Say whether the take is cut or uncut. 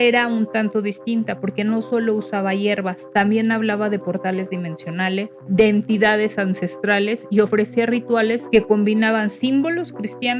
cut